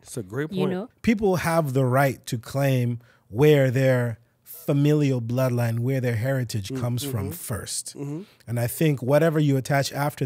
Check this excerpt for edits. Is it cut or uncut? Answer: cut